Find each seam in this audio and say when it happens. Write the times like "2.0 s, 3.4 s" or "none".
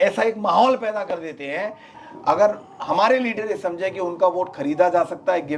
1.9 s